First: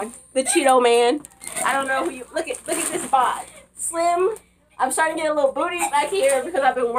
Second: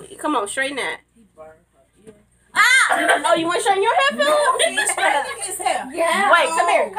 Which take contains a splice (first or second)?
second